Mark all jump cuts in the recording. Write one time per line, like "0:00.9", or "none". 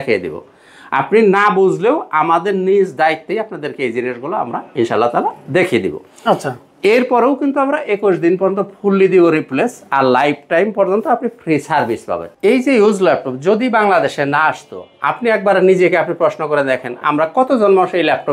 0:12.3